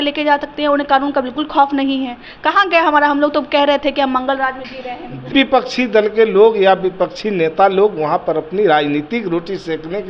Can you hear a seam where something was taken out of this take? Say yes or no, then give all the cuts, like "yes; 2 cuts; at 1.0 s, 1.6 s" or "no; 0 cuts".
yes; 1 cut; at 5.3 s